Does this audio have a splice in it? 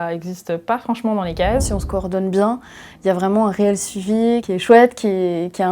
yes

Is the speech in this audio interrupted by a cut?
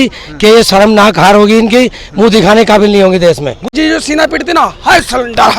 yes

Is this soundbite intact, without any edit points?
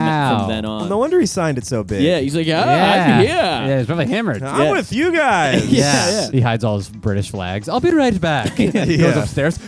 no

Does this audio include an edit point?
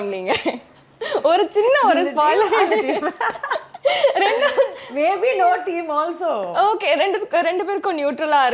no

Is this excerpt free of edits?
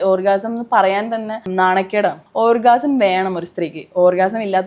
no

